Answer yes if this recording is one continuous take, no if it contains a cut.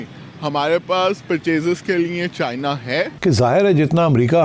no